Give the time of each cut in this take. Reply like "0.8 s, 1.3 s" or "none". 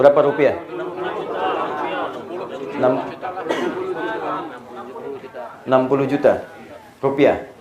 none